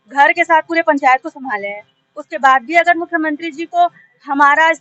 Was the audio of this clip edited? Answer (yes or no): no